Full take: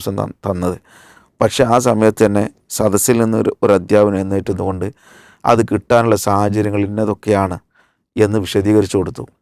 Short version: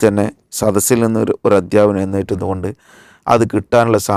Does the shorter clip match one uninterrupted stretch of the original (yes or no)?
yes